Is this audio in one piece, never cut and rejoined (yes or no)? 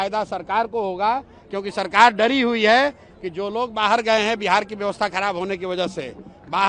yes